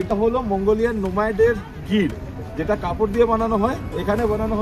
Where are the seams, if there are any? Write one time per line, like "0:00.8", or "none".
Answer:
none